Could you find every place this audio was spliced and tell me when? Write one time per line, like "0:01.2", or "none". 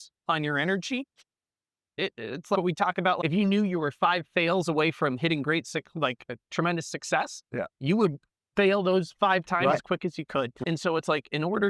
none